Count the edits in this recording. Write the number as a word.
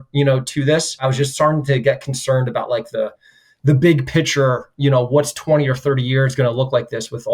one